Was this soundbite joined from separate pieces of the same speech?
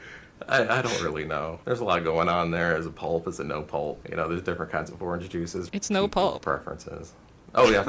yes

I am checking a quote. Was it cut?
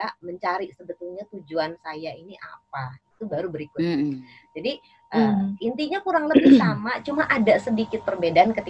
no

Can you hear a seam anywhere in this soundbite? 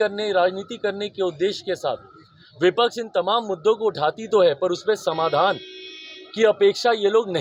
no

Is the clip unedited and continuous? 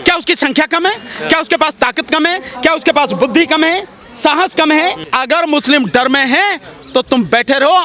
no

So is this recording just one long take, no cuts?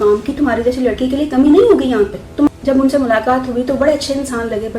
no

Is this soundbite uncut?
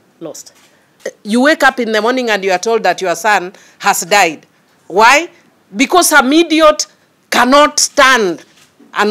no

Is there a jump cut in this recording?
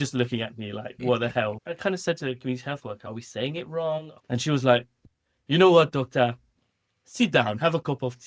yes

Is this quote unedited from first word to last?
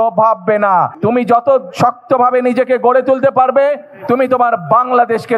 no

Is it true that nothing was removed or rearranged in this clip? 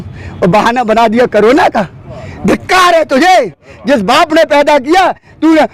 yes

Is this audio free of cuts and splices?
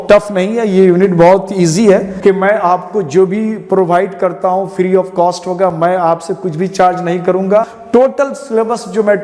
no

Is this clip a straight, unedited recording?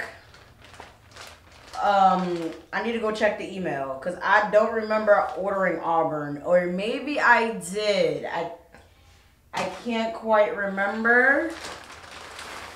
yes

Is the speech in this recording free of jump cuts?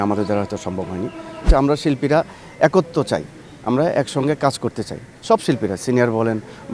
no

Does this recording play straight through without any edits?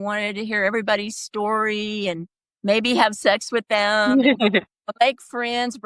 yes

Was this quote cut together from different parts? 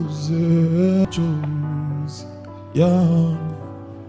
yes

